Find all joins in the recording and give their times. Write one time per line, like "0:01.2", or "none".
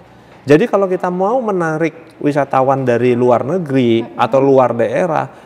none

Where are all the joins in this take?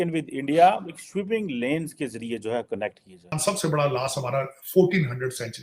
0:03.3

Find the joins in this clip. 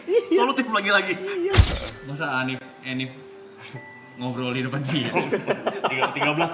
0:01.6

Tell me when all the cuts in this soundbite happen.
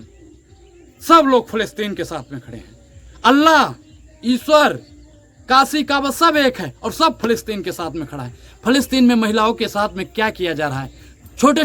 none

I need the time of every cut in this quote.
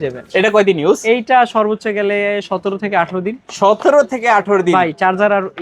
none

